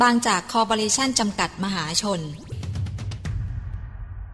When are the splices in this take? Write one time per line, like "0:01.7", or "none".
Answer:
0:02.6